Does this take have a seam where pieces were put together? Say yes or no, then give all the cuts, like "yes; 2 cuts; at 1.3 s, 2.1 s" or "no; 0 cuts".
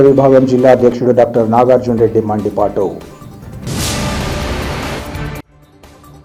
no; 0 cuts